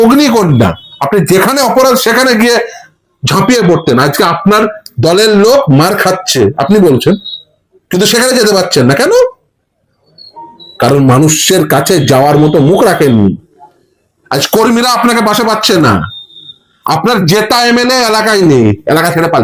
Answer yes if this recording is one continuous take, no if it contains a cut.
yes